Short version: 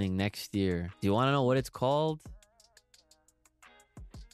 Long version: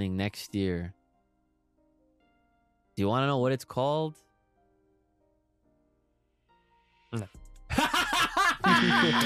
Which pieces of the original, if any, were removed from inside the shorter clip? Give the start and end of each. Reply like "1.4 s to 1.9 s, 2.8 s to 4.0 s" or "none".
0.9 s to 2.9 s